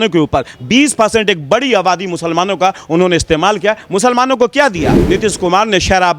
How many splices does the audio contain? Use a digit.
1